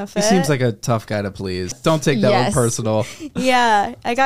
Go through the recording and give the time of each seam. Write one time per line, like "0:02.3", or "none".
0:01.8